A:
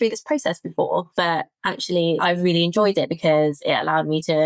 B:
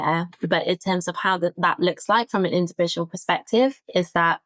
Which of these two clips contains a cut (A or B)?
A